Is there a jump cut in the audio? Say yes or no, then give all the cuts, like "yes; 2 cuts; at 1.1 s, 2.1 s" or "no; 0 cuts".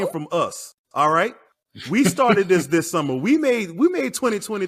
no; 0 cuts